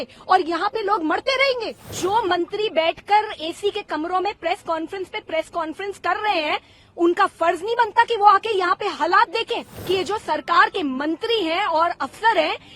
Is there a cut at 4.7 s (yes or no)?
no